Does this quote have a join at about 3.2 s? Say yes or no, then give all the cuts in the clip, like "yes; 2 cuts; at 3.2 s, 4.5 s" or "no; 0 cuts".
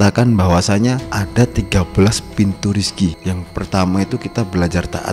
yes; 2 cuts; at 1.1 s, 3.2 s